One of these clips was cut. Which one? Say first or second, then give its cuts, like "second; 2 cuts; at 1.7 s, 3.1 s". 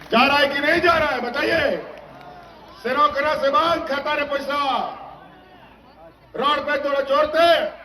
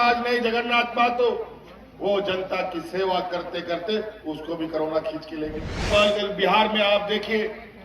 second; 1 cut; at 5.9 s